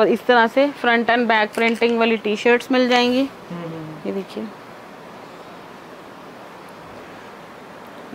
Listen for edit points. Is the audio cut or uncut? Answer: uncut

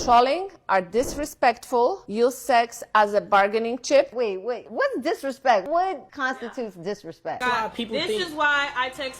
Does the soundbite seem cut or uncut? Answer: cut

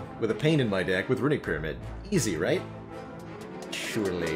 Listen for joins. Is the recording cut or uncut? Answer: uncut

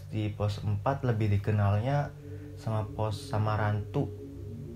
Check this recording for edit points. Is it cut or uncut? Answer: uncut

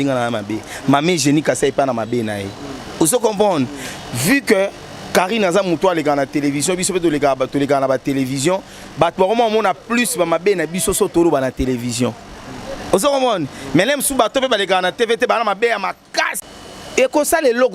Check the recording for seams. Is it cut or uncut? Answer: cut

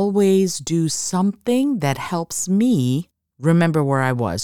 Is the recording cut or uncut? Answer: uncut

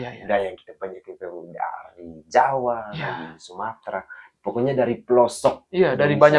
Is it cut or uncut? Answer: uncut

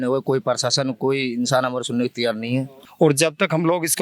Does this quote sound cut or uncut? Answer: cut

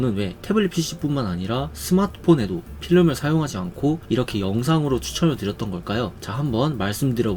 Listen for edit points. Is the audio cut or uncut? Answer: uncut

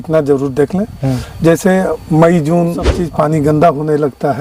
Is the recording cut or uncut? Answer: cut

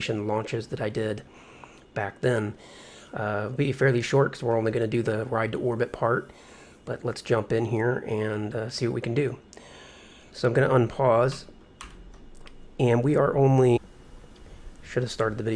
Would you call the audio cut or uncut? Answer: uncut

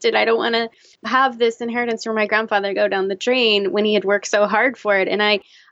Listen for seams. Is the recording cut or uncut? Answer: cut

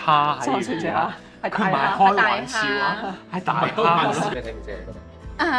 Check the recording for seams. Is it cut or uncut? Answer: cut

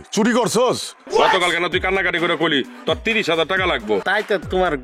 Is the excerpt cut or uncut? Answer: cut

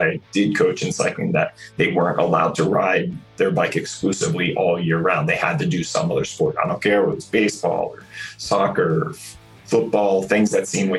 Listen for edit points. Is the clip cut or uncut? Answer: uncut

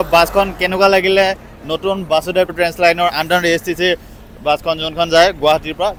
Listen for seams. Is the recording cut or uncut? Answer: uncut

